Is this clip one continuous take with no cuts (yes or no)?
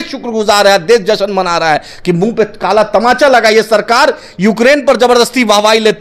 yes